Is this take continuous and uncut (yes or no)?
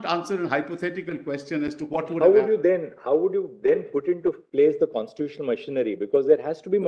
yes